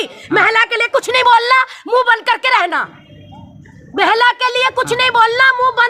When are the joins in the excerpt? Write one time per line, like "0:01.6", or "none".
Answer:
none